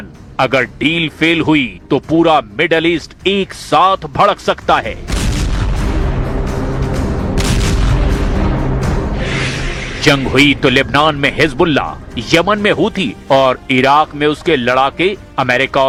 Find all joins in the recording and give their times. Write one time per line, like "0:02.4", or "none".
none